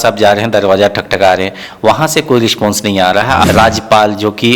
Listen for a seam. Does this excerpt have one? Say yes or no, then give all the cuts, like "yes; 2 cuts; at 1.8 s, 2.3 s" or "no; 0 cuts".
yes; 1 cut; at 3.4 s